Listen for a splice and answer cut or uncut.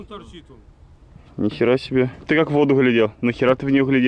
cut